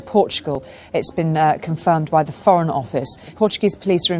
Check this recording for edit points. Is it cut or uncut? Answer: cut